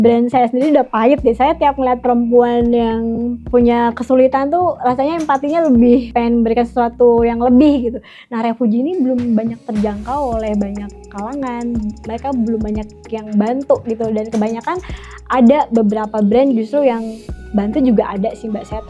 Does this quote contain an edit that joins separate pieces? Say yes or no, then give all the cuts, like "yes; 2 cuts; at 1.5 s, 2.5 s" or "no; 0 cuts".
yes; 2 cuts; at 3.4 s, 6.1 s